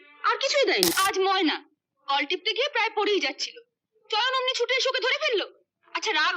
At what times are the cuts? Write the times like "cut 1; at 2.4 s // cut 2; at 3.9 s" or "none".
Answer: cut 1; at 0.9 s